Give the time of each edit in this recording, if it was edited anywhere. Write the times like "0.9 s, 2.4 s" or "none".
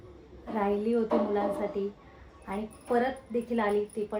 none